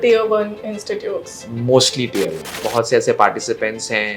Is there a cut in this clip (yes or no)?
yes